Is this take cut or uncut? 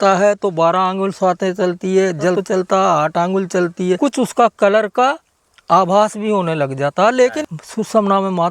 cut